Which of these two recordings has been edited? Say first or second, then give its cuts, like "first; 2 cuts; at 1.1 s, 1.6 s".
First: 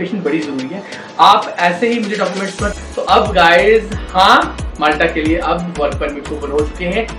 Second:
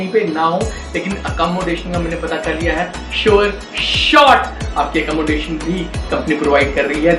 first; 1 cut; at 2.8 s